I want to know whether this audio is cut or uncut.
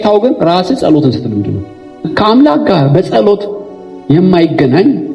cut